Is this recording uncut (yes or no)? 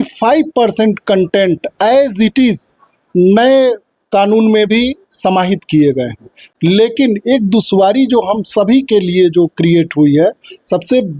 yes